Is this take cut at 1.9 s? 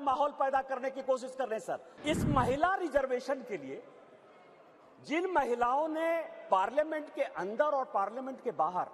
yes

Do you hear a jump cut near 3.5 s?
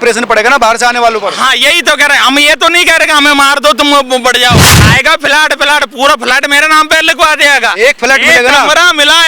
no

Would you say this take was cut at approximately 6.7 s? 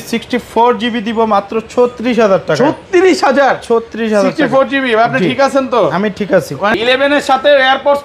yes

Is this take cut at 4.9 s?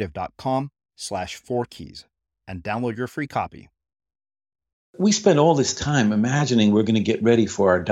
yes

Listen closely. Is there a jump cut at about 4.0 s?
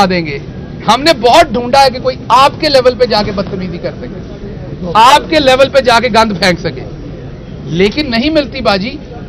no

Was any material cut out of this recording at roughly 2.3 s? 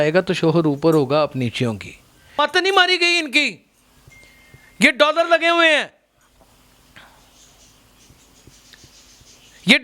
yes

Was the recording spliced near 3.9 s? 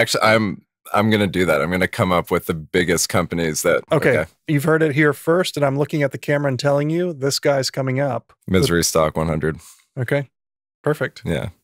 yes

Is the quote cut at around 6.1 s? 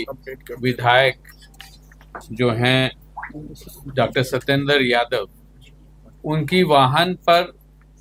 no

